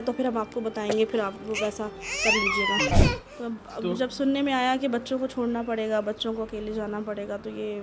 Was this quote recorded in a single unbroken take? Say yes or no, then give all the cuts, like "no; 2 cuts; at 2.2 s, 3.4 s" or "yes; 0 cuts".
no; 1 cut; at 2.9 s